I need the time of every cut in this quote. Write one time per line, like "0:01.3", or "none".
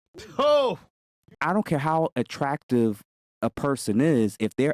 0:01.4